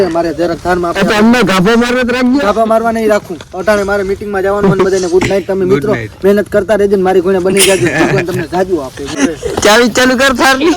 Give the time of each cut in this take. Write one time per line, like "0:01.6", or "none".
0:09.2